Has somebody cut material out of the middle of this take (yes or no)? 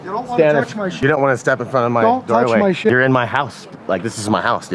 yes